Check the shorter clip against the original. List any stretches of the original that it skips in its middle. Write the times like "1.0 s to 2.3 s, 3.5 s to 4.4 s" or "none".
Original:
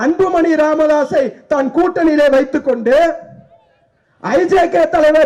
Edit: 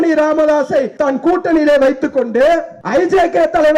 1.3 s to 1.4 s, 3.3 s to 4.1 s